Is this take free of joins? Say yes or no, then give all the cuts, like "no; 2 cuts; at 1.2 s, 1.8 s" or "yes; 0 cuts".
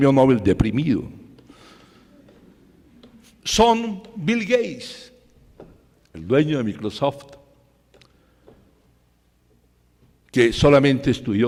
yes; 0 cuts